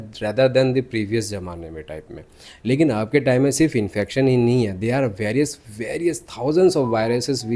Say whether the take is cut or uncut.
uncut